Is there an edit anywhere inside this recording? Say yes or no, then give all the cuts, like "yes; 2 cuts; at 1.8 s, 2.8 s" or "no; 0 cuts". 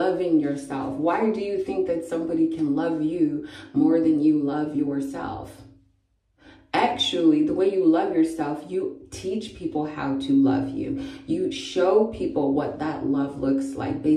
no; 0 cuts